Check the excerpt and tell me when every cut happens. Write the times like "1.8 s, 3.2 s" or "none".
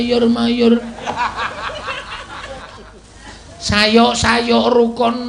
none